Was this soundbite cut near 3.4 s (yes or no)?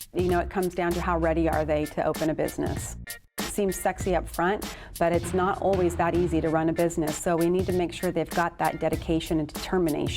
yes